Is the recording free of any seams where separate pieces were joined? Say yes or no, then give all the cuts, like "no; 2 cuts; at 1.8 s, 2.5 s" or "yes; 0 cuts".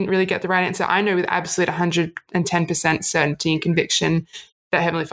yes; 0 cuts